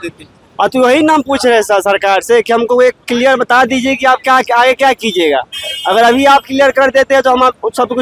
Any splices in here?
no; 0 cuts

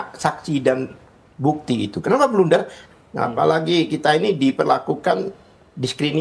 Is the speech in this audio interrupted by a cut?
yes; 1 cut; at 2.8 s

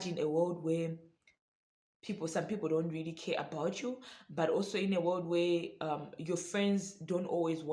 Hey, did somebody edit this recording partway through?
no; 0 cuts

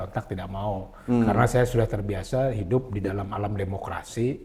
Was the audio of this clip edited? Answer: no; 0 cuts

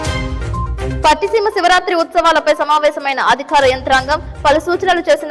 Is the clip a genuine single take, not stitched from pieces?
no; 1 cut; at 0.9 s

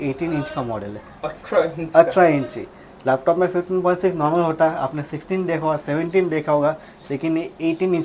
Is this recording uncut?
yes; 0 cuts

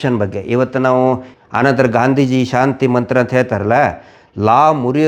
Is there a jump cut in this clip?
yes; 1 cut; at 1.3 s

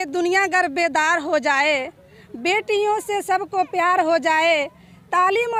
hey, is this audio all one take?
yes; 0 cuts

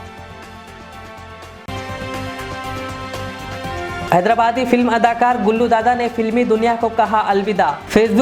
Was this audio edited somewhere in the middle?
yes; 2 cuts; at 1.6 s, 4.1 s

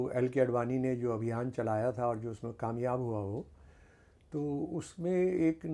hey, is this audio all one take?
yes; 0 cuts

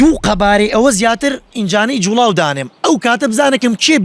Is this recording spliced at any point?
yes; 1 cut; at 1.5 s

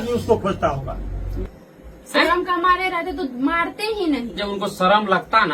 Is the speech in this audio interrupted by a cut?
yes; 2 cuts; at 1.3 s, 4.5 s

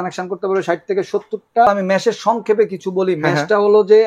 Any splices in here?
yes; 1 cut; at 1.7 s

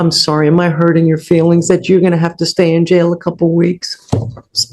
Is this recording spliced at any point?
no; 0 cuts

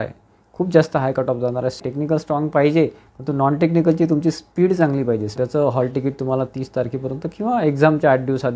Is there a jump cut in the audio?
yes; 2 cuts; at 1.9 s, 5.3 s

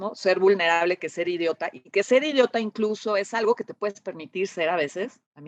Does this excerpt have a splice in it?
no; 0 cuts

